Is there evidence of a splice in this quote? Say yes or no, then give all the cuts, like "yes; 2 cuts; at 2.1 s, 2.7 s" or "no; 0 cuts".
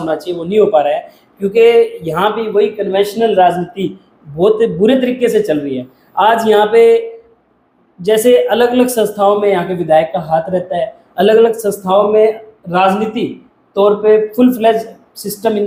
no; 0 cuts